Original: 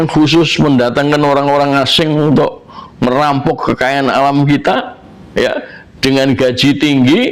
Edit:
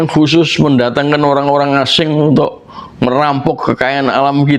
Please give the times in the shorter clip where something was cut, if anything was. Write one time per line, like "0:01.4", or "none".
none